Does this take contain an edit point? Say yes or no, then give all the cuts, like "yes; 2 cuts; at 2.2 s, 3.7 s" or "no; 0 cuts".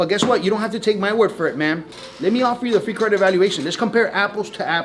no; 0 cuts